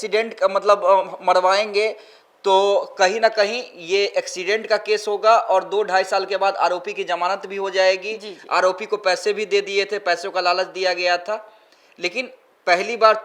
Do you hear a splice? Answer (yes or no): no